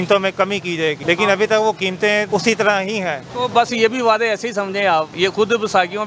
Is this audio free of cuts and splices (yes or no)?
no